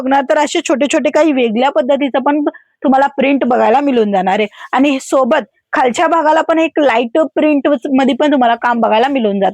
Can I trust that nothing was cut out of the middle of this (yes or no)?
yes